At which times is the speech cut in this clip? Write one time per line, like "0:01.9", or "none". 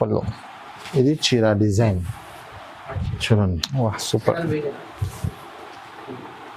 none